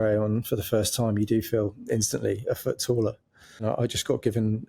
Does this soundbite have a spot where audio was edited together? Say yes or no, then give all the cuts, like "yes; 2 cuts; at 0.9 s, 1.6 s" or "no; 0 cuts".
yes; 1 cut; at 3.6 s